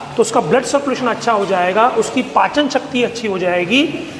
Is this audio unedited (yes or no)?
yes